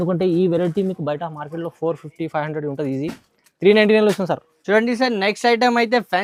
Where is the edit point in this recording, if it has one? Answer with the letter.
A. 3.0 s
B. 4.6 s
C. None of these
C